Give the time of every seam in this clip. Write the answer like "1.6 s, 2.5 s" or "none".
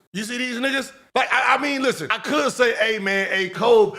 1.0 s, 2.2 s